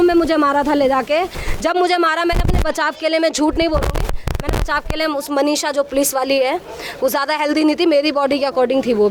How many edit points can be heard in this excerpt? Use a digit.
0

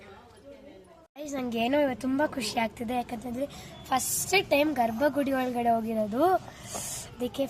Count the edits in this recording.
1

